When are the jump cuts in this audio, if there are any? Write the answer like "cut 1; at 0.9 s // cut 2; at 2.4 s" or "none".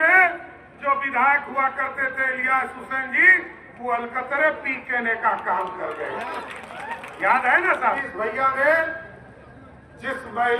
cut 1; at 8.0 s